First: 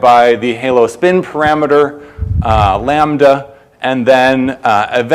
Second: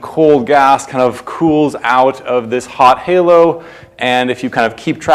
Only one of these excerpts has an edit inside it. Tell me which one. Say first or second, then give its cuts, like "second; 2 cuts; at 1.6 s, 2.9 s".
first; 1 cut; at 2.2 s